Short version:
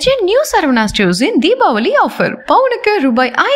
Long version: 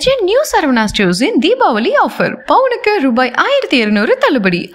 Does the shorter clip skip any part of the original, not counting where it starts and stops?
no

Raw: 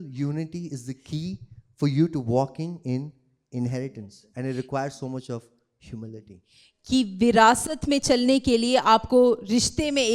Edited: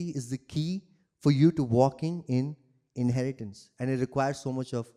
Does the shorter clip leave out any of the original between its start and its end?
no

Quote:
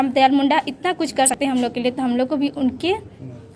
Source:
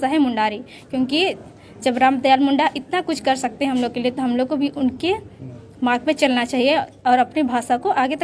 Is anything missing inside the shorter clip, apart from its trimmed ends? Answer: yes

